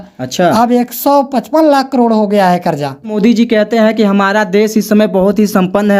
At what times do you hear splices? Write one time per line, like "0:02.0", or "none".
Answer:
0:03.1